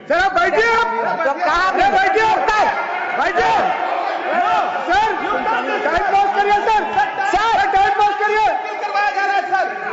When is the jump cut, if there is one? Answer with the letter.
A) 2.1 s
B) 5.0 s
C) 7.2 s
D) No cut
D